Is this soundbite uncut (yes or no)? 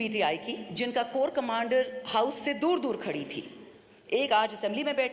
yes